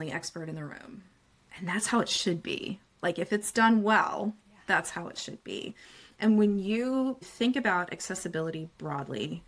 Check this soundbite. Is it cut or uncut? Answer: uncut